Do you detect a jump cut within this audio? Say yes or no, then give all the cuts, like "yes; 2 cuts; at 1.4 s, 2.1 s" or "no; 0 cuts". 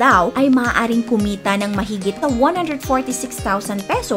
yes; 1 cut; at 2.2 s